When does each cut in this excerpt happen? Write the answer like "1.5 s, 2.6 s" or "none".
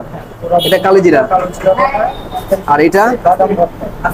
none